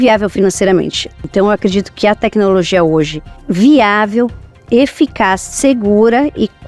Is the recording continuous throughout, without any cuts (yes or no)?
no